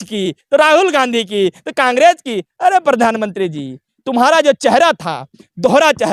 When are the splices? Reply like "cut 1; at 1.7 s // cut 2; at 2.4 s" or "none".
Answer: none